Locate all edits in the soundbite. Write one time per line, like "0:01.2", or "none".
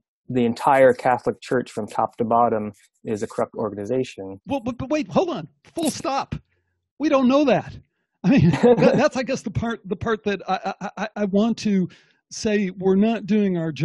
none